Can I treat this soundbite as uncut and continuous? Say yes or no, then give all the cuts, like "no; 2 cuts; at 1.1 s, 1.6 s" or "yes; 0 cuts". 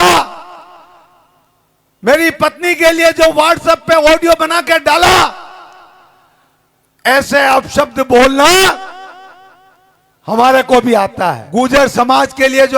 no; 1 cut; at 11.4 s